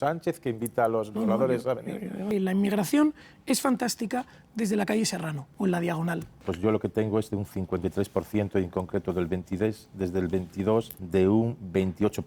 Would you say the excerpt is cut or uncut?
cut